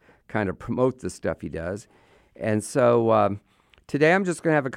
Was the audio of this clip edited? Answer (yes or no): no